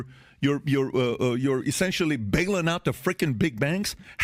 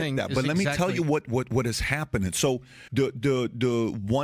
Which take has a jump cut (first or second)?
second